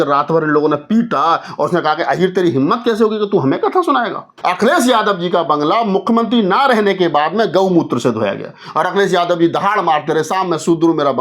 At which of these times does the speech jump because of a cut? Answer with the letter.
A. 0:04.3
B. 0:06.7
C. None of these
A